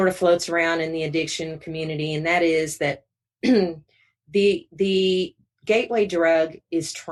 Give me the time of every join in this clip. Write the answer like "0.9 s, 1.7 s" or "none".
none